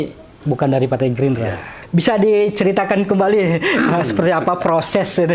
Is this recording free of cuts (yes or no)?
no